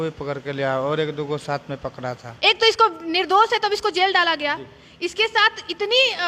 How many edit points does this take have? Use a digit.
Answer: 1